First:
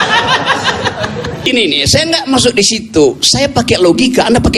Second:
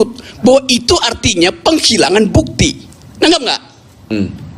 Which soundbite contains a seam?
first; 1 cut; at 1.5 s

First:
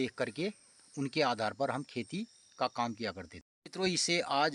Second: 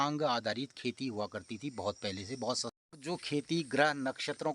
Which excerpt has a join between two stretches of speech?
second; 1 cut; at 2.7 s

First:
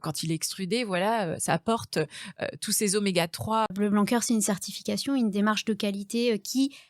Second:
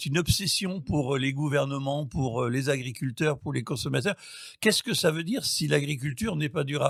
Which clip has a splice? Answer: first; 1 cut; at 3.7 s

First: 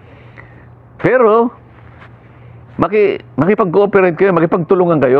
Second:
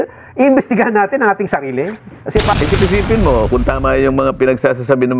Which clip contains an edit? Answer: second; 1 cut; at 2.5 s

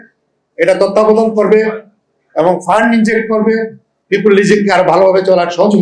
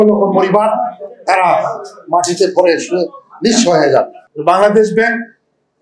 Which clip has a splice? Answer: second; 1 cut; at 4.2 s

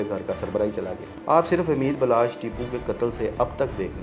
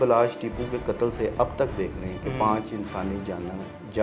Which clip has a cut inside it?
first; 1 cut; at 1.1 s

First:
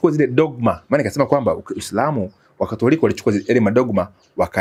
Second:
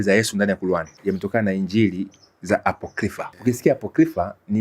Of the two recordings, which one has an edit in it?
second; 2 cuts; at 0.9 s, 3.3 s

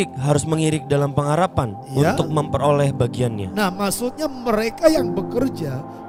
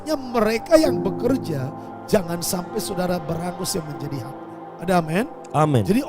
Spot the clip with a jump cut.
second; 1 cut; at 4.4 s

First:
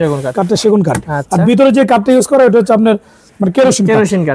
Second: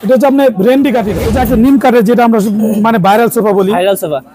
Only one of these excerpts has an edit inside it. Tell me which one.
second; 1 cut; at 1.2 s

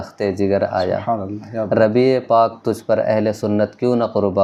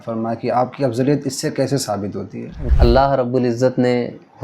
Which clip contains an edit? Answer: second; 1 cut; at 2.6 s

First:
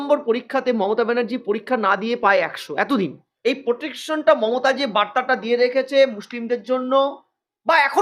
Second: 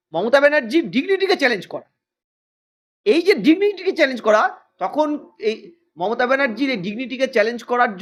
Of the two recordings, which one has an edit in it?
first; 1 cut; at 3.2 s

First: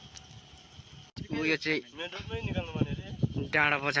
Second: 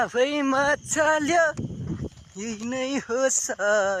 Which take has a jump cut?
first; 1 cut; at 1.1 s

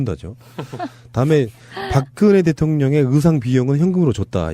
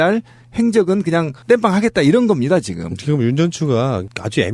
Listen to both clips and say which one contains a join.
first; 1 cut; at 1.0 s

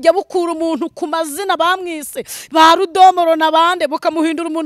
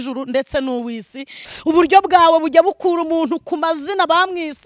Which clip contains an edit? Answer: second; 1 cut; at 1.4 s

